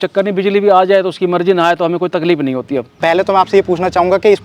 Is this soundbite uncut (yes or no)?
no